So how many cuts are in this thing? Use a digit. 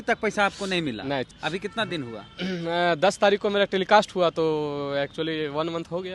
1